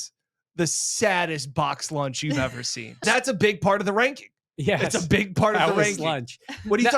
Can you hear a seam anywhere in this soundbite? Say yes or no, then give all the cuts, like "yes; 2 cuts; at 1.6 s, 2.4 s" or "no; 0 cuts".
yes; 1 cut; at 3.0 s